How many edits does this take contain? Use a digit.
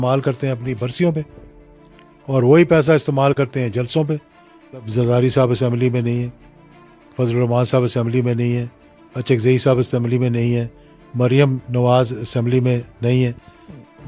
1